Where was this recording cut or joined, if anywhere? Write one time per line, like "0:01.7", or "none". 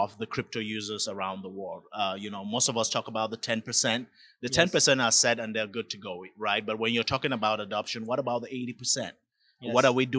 none

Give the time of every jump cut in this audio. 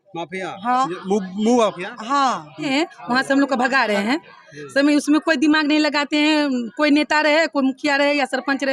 0:02.7

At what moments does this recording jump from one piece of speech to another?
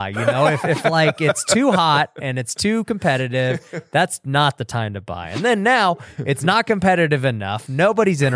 none

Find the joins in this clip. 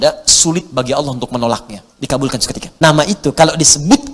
0:02.6

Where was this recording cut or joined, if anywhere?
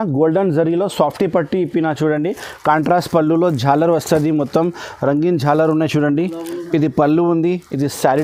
none

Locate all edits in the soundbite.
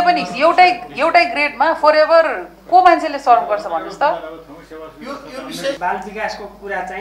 0:05.8

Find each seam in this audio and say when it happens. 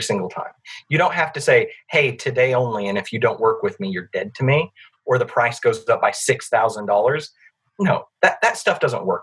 none

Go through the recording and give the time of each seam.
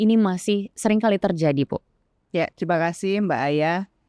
none

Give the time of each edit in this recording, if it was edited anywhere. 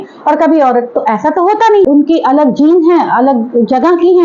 0:01.8

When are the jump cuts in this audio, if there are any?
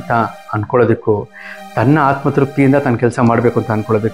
none

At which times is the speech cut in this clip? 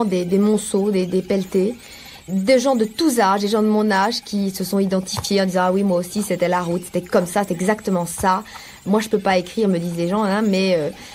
0:02.3
0:07.1
0:08.8

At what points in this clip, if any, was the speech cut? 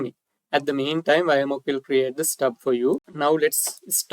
0:03.1

